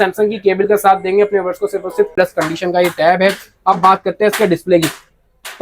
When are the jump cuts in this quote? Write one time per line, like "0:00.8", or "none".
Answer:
0:02.1